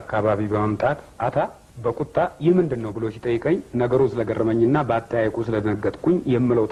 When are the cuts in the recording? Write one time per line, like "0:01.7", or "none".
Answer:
none